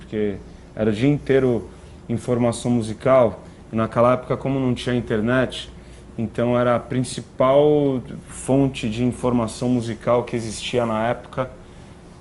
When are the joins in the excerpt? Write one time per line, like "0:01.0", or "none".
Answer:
0:04.6